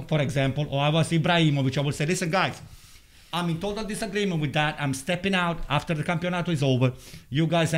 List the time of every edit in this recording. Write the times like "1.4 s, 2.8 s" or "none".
none